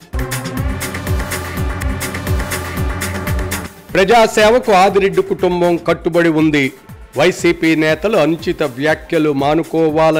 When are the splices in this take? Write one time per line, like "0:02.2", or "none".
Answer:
none